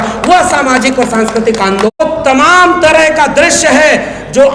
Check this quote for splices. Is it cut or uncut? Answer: cut